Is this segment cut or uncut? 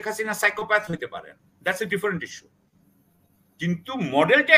uncut